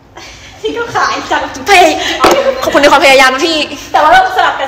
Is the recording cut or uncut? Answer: uncut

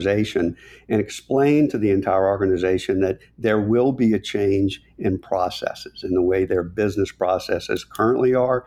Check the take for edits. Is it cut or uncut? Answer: uncut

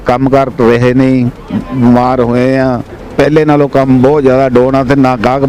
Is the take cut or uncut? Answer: cut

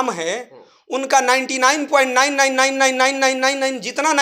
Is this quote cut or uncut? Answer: uncut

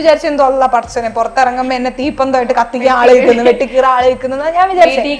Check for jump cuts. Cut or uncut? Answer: uncut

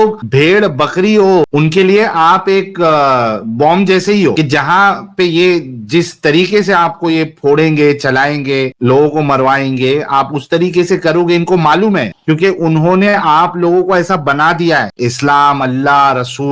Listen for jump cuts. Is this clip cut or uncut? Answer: uncut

